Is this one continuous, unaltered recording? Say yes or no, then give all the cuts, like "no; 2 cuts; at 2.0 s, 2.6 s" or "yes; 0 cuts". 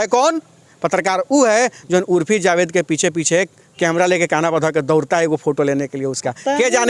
yes; 0 cuts